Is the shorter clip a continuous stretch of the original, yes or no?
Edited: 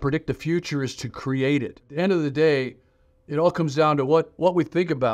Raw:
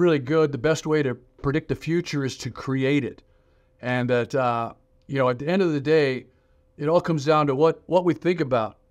no